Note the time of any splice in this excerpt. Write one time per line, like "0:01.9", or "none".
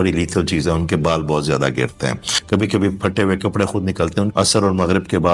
0:02.3
0:04.3